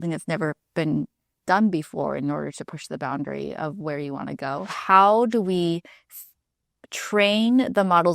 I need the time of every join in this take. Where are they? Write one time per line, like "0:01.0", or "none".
0:04.7